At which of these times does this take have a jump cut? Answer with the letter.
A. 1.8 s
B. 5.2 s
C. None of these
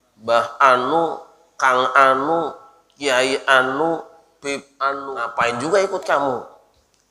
B